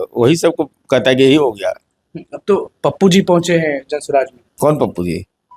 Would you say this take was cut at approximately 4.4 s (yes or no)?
yes